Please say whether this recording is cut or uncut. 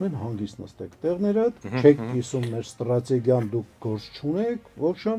cut